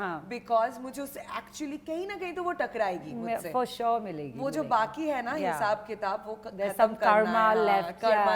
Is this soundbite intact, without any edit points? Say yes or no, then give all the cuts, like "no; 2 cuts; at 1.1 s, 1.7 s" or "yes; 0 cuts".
yes; 0 cuts